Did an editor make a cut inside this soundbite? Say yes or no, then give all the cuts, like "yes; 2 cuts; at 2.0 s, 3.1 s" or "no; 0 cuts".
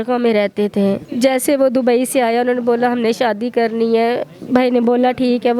yes; 1 cut; at 1.1 s